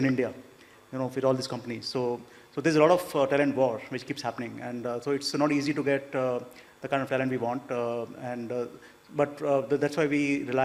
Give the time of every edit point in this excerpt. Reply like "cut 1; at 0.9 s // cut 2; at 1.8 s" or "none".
none